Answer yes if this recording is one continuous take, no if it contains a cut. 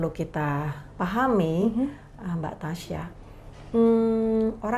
yes